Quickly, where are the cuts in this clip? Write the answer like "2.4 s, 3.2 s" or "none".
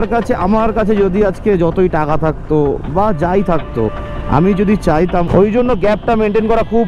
5.3 s